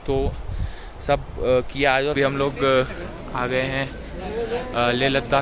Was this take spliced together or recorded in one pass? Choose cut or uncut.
cut